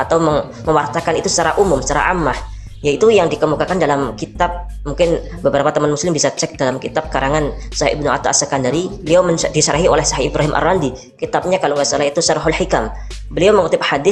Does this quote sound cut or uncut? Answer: uncut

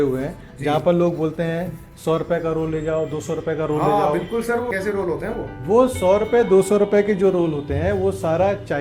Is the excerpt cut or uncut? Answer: cut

